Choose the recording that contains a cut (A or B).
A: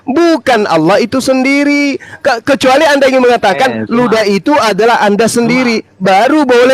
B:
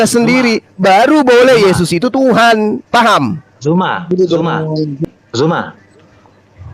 B